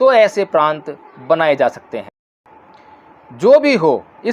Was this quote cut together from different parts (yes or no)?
no